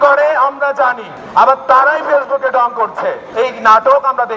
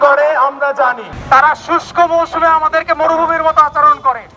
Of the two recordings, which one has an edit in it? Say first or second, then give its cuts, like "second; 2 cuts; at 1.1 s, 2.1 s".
second; 1 cut; at 1.1 s